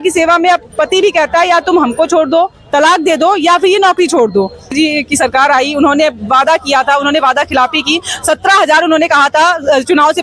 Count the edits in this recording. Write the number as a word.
one